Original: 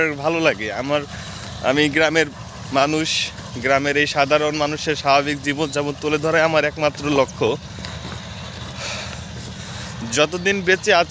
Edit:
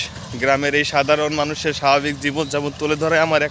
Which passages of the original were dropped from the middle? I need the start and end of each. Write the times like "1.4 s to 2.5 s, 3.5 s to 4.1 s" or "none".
none